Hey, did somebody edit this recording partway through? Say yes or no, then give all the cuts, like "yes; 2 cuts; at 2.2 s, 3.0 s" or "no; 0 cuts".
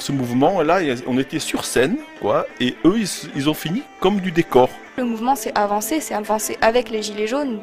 yes; 1 cut; at 5.0 s